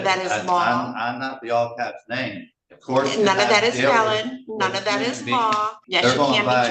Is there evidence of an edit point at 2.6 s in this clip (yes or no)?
no